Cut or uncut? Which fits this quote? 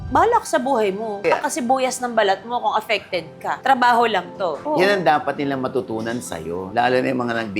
cut